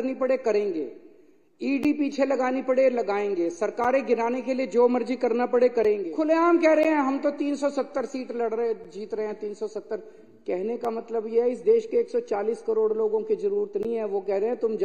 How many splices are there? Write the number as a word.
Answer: one